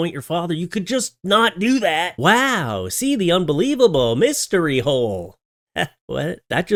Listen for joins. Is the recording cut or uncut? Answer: uncut